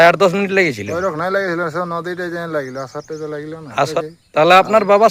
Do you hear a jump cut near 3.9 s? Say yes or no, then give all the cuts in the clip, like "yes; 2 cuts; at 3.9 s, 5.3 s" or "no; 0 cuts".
yes; 1 cut; at 3.9 s